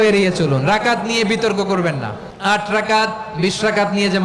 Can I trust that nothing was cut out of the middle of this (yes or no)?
no